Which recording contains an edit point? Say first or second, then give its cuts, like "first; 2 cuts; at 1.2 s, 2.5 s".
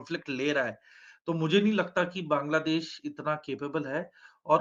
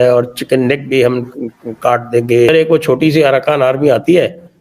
second; 1 cut; at 2.5 s